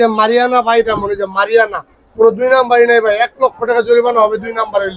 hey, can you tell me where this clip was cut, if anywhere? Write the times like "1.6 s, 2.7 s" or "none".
none